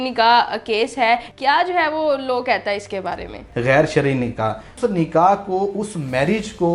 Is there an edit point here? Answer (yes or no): yes